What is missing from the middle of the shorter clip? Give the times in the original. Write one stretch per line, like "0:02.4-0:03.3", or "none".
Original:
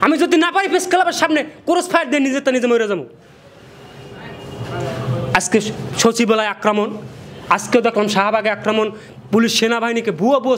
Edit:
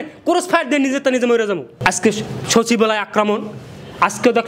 0:03.1-0:05.2

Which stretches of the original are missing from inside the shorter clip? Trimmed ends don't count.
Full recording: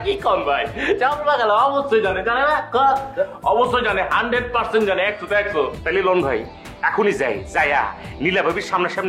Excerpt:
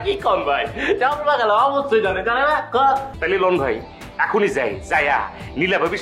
0:03.1-0:05.7

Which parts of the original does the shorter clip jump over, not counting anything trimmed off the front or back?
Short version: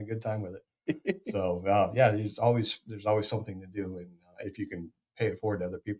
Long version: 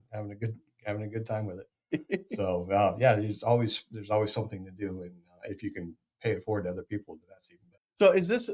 none

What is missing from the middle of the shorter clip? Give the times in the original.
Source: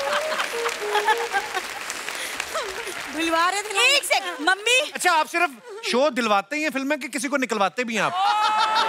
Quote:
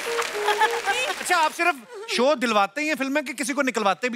0:01.6-0:04.9

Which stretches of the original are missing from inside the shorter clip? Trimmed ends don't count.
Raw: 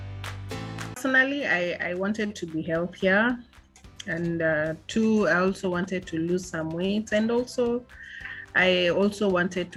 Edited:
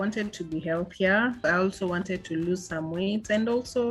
0:03.5-0:05.3

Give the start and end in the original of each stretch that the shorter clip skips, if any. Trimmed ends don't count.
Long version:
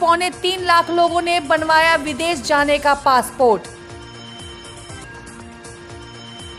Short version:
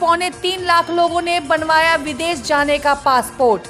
none

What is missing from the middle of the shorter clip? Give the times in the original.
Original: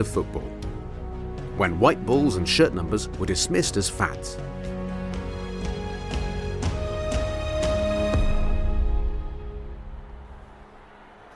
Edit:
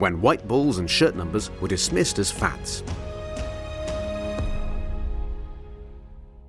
0:04.1-0:06.3

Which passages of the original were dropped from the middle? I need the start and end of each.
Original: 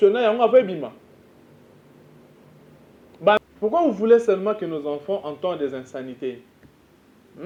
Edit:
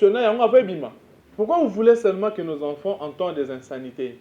0:01.3-0:03.5

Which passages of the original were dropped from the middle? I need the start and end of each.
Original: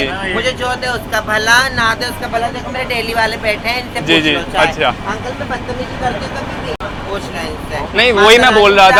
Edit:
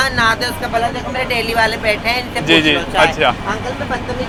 none

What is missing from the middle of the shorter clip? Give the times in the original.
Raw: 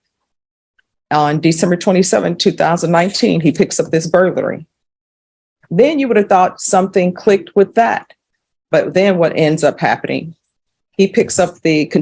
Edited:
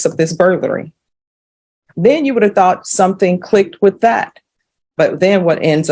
none

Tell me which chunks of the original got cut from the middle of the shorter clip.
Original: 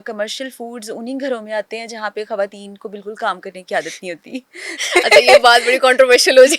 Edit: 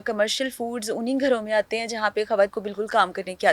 0:02.6-0:02.8

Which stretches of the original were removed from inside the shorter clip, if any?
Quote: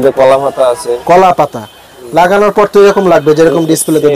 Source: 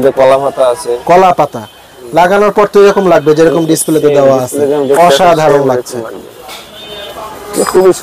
none

